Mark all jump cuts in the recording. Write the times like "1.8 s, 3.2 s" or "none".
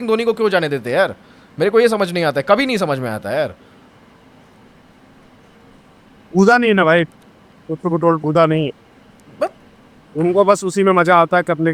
none